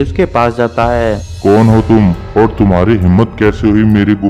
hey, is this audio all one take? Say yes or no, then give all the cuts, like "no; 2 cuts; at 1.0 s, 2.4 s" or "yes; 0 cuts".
no; 1 cut; at 1.3 s